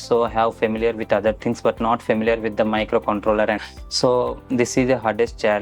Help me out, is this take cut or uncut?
cut